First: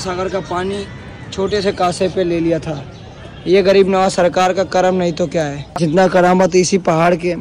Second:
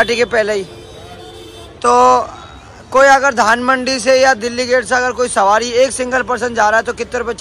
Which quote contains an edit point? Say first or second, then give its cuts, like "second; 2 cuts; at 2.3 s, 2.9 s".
first; 1 cut; at 5.8 s